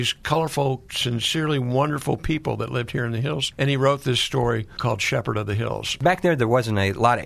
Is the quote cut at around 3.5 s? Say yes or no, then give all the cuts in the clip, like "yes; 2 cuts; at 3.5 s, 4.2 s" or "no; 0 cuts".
yes; 4 cuts; at 0.9 s, 3.5 s, 4.8 s, 6.0 s